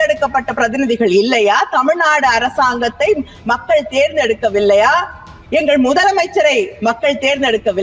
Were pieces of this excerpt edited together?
no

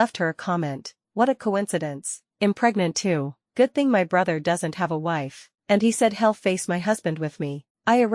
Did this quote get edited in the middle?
no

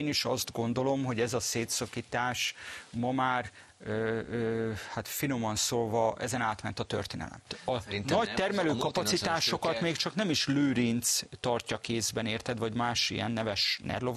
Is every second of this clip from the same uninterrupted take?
no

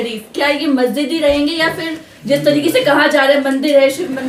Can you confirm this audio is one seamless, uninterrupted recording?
yes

